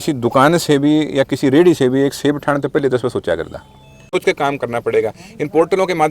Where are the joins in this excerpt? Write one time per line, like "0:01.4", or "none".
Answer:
0:04.1